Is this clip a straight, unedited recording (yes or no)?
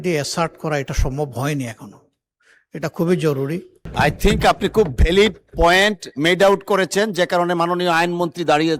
no